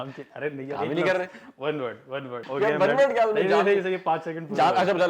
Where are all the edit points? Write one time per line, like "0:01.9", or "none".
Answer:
0:02.4

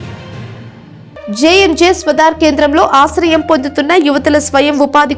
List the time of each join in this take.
0:01.0

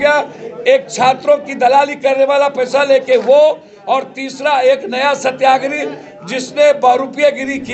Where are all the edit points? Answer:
none

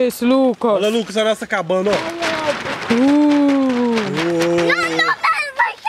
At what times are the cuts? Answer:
none

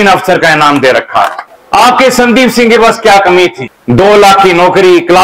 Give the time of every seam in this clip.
0:01.4
0:03.7

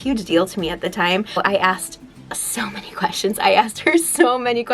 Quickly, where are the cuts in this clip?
none

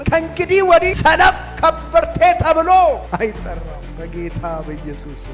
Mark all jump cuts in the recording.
0:00.9

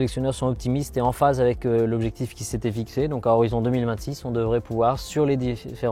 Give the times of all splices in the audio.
none

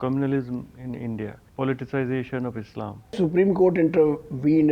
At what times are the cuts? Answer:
0:01.4
0:03.1

